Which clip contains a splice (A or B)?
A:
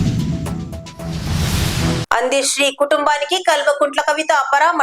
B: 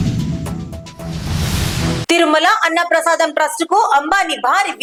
A